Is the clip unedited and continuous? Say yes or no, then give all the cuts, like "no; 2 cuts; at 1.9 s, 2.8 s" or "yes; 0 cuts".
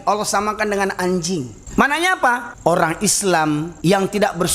no; 3 cuts; at 1.6 s, 2.5 s, 3.7 s